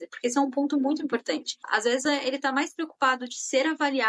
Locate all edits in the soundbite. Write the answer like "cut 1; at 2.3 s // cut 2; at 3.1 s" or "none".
cut 1; at 1.6 s